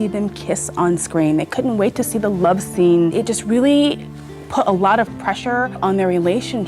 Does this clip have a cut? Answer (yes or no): yes